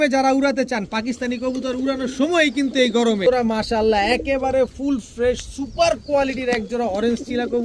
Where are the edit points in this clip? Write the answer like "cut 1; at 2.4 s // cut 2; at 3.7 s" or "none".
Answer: cut 1; at 3.3 s